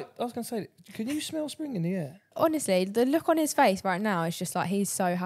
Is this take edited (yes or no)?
yes